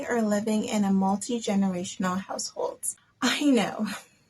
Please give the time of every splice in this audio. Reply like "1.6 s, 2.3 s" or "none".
2.8 s